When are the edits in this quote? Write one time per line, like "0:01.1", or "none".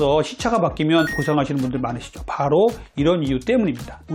0:01.2